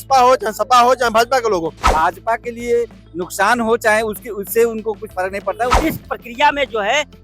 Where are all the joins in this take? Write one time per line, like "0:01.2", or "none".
0:01.9
0:05.8